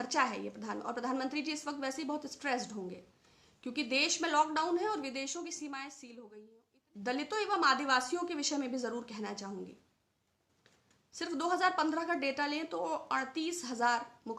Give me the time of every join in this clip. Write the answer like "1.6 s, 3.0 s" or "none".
6.3 s